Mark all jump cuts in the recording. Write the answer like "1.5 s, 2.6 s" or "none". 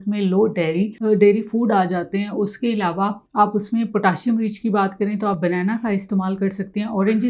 1.0 s, 3.2 s